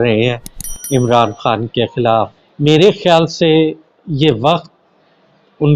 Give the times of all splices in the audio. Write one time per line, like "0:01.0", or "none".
0:02.4